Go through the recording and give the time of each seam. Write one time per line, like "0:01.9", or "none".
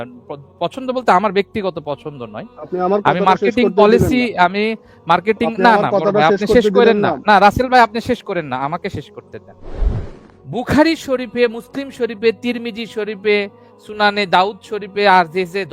0:10.0